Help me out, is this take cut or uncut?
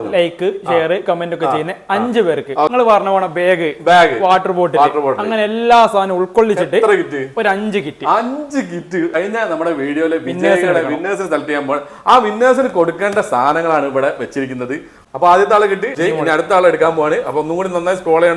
cut